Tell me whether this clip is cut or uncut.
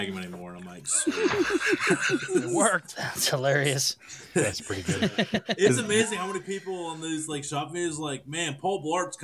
uncut